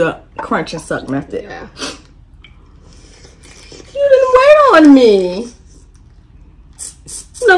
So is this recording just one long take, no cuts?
yes; 0 cuts

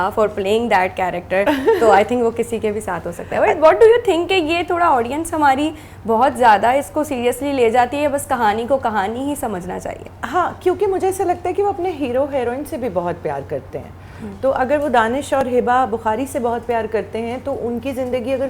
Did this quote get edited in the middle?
no; 0 cuts

